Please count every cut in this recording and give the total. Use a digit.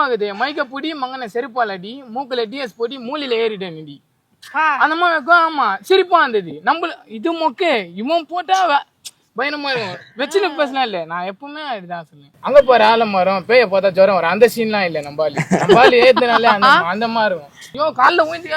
2